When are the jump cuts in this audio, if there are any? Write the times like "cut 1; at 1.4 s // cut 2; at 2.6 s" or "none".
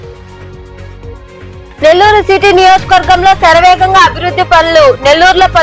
cut 1; at 1.2 s